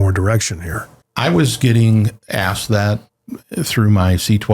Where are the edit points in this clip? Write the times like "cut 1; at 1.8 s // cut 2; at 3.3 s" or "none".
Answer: cut 1; at 0.9 s